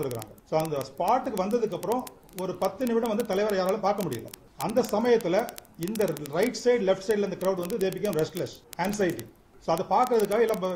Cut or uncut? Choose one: cut